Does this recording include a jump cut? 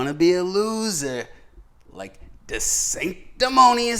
no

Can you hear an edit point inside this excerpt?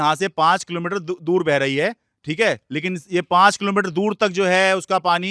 no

